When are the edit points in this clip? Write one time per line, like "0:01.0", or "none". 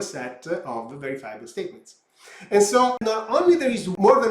0:03.4